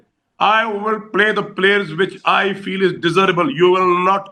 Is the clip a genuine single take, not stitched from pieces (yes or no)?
no